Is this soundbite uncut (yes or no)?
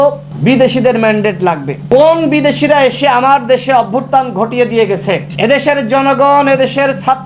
yes